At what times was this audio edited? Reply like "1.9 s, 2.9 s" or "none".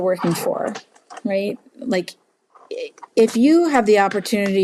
none